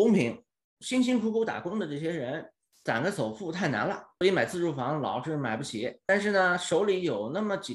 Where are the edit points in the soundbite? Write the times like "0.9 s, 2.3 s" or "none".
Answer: 6.0 s